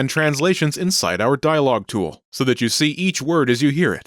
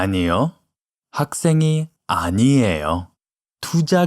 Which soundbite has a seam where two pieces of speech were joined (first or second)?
second